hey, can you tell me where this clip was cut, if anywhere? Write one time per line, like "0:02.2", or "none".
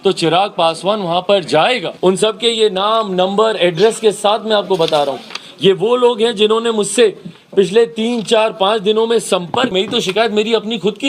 0:01.9
0:09.7